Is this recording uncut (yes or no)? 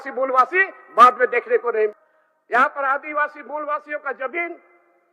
no